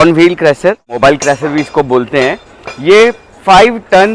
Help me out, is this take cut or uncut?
cut